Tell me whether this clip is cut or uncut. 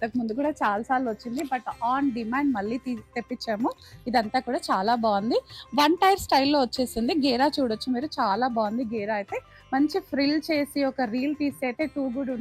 uncut